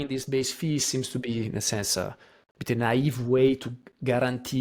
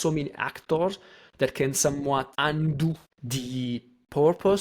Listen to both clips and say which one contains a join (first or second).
second